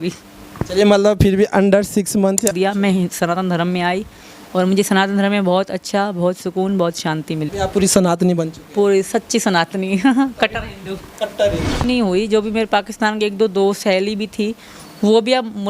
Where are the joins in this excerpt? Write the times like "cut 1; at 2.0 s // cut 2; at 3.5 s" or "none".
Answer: cut 1; at 2.5 s // cut 2; at 7.5 s // cut 3; at 11.8 s